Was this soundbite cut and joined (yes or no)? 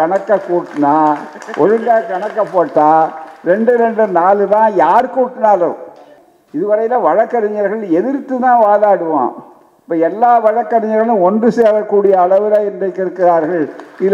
yes